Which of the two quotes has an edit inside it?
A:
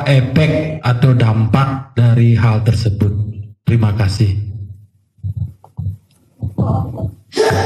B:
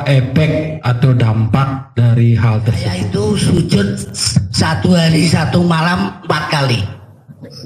B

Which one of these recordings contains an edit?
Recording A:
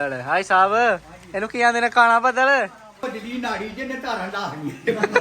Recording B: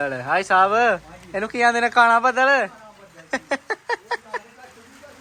A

